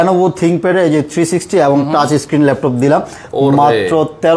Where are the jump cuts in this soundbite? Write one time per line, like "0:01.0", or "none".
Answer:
none